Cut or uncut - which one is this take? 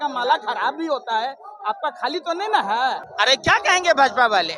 cut